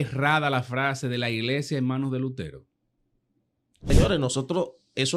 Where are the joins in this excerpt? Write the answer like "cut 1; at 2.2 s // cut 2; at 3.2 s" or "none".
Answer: cut 1; at 3.9 s